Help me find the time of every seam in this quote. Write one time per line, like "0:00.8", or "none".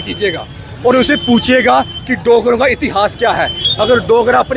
0:03.6